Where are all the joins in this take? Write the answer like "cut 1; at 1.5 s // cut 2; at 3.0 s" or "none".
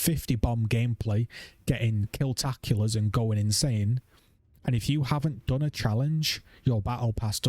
none

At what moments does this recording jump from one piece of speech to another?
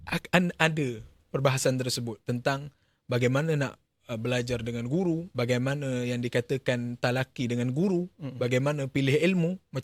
cut 1; at 5.3 s

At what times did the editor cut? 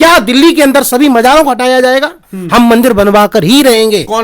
cut 1; at 2.2 s

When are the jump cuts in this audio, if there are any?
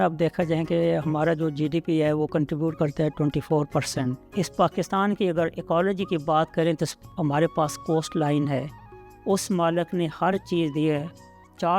cut 1; at 4.2 s

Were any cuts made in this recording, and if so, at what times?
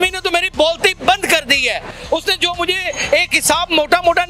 none

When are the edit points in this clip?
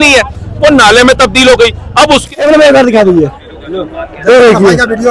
cut 1; at 2.3 s

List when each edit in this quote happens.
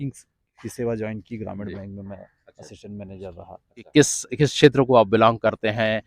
cut 1; at 3.9 s

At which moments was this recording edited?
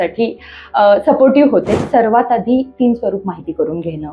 cut 1; at 1.8 s

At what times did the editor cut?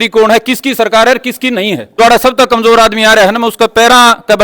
cut 1; at 1.8 s

